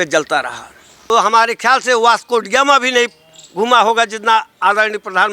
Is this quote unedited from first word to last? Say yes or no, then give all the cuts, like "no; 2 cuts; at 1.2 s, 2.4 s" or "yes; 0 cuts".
no; 1 cut; at 0.9 s